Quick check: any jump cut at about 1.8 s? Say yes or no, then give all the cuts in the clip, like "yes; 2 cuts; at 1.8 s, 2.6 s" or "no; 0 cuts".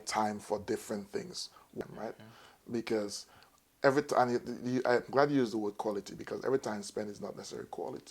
yes; 1 cut; at 1.8 s